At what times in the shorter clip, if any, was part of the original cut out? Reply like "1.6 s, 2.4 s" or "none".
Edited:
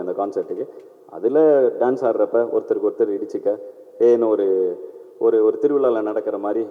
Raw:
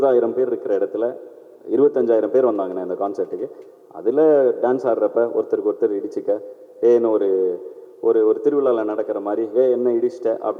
none